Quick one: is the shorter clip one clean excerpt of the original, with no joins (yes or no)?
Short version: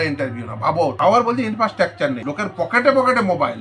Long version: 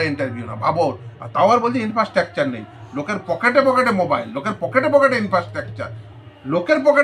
no